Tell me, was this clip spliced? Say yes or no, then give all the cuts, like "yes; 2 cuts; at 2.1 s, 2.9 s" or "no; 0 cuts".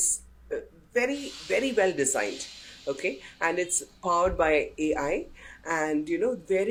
no; 0 cuts